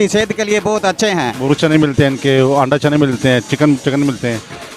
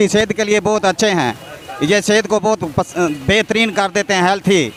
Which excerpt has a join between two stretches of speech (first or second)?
first